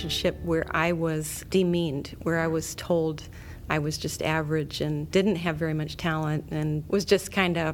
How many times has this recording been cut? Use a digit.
3